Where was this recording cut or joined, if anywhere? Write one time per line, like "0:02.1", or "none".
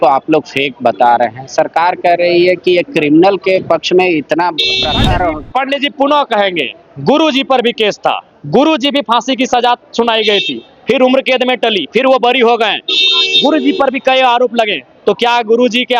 none